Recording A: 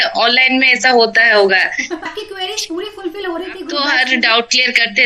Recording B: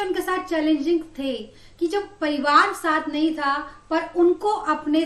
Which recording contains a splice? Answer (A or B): A